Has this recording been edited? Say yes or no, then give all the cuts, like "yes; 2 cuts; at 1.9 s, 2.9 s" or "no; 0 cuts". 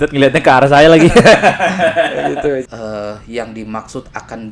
yes; 1 cut; at 2.6 s